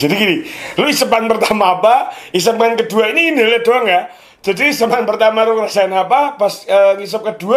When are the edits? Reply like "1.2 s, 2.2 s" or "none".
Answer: none